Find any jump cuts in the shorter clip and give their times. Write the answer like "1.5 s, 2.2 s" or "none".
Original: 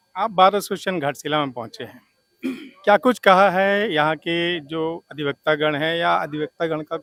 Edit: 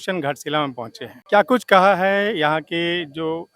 1.1 s